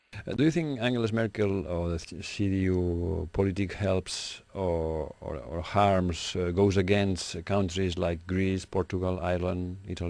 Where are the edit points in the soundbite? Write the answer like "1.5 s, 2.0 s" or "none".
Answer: 8.0 s